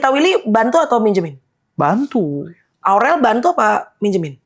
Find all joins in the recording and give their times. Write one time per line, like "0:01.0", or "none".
0:02.8